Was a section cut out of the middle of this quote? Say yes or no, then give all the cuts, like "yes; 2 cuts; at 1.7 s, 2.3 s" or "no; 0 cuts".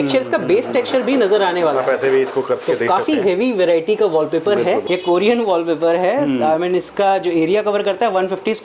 yes; 1 cut; at 4.8 s